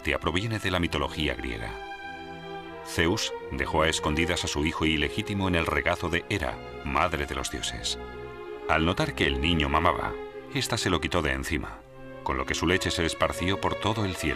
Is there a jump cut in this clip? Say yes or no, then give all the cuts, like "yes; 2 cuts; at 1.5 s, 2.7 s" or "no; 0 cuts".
yes; 1 cut; at 13.2 s